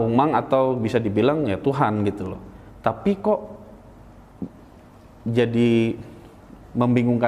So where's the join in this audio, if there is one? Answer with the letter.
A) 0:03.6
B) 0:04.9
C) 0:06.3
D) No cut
D